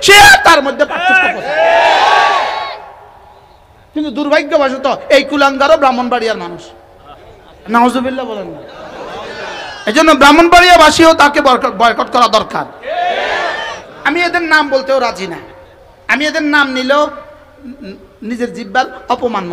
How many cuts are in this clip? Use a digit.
2